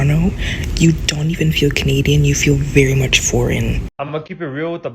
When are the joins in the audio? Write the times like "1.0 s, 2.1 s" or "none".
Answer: 3.9 s